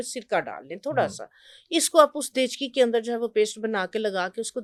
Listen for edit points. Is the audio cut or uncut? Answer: uncut